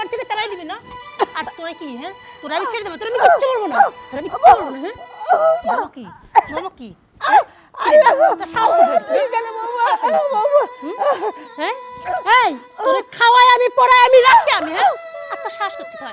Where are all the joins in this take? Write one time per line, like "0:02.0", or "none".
0:11.5